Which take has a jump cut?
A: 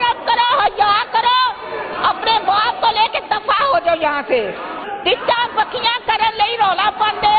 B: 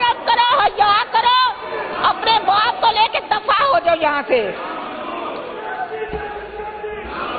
A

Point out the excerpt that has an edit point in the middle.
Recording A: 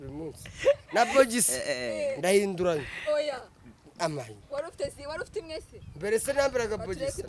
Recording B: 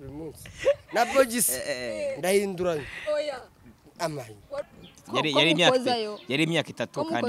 B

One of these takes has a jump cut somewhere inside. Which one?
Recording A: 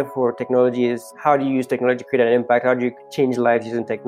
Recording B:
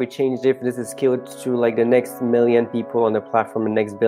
A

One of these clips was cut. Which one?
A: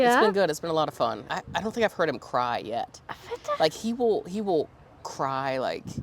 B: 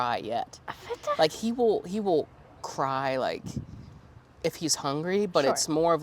A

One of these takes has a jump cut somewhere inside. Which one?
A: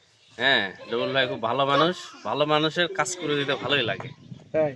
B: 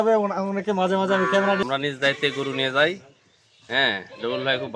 B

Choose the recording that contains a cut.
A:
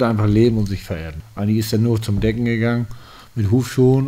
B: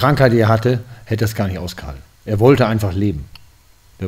A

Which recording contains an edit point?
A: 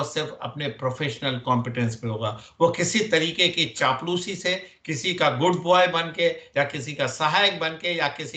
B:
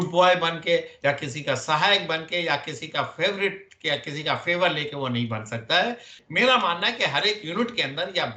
B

